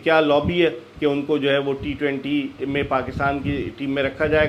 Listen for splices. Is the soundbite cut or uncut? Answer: uncut